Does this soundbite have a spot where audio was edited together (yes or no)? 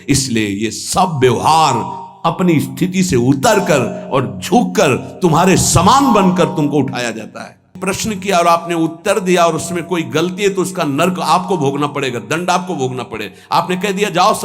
yes